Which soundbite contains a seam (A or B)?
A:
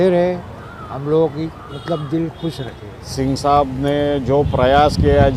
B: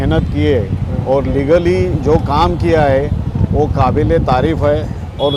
A